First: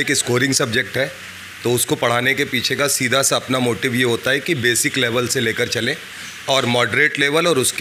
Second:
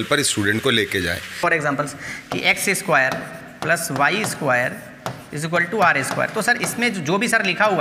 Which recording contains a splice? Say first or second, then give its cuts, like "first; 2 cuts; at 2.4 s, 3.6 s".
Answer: second; 1 cut; at 1.4 s